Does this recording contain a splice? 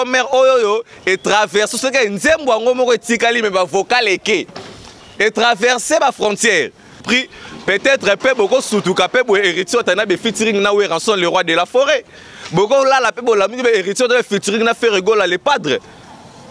yes; 1 cut; at 7.0 s

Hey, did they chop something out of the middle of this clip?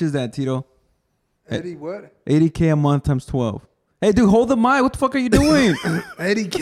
no; 0 cuts

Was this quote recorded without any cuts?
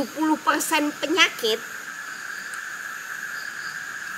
yes; 0 cuts

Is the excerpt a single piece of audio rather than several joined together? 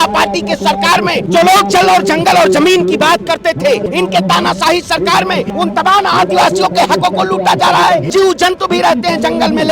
no; 4 cuts; at 1.2 s, 3.8 s, 5.5 s, 8.1 s

